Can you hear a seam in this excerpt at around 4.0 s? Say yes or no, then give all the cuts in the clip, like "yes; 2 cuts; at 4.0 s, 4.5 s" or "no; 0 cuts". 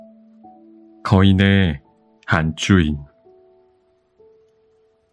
no; 1 cut; at 1.0 s